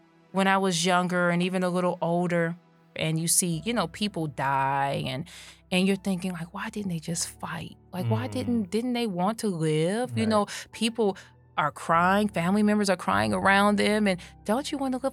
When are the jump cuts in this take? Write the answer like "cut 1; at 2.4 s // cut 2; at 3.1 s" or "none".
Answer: cut 1; at 3.0 s